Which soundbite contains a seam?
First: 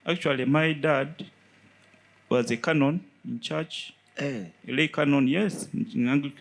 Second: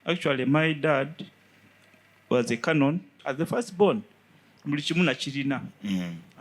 second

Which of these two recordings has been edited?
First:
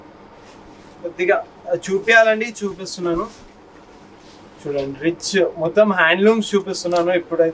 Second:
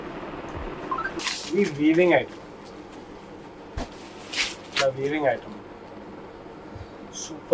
second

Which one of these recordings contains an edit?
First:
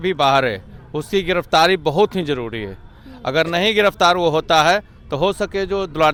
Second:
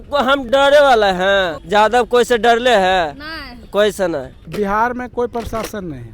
second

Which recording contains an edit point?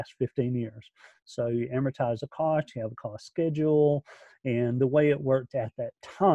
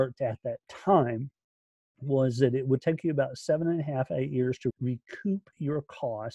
second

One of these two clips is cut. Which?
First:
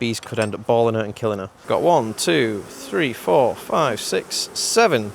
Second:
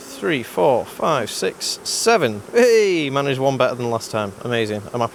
first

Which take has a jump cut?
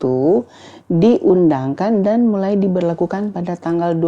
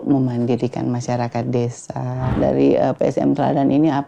second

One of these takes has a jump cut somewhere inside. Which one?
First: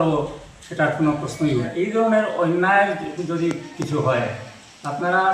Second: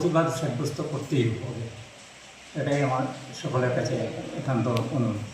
first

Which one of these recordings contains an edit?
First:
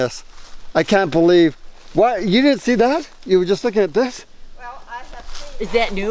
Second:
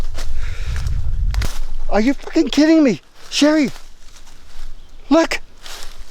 second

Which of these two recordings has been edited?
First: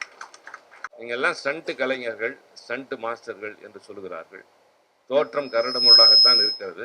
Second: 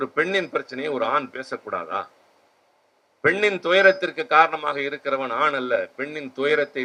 first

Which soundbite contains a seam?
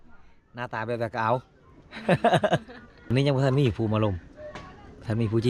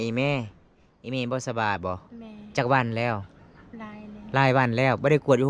first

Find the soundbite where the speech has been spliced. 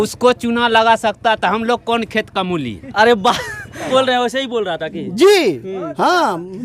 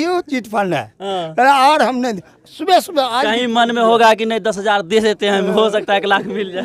first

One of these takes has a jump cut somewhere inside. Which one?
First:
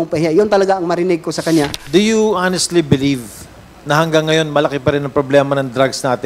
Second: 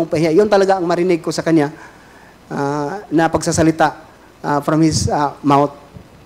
first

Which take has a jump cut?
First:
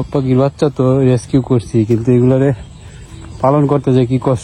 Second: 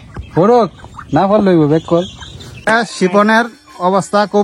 second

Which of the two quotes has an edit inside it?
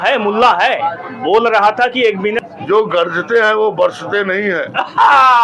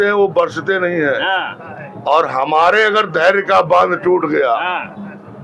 first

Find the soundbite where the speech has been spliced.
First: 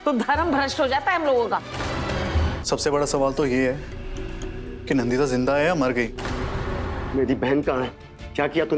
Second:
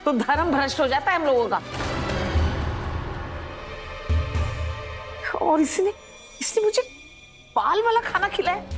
first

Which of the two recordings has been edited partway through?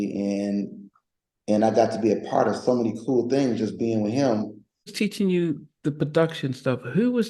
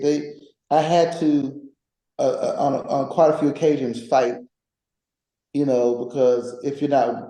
first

